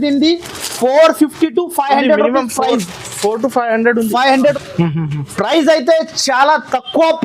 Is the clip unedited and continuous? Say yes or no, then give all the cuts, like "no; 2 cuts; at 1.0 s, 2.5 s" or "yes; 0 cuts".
no; 1 cut; at 4.5 s